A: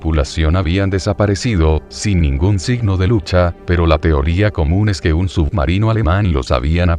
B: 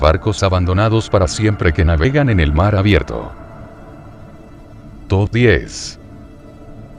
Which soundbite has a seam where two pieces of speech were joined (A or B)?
A